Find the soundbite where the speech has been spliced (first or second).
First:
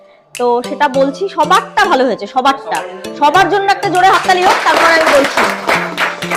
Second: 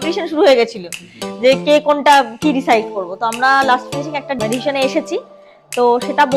second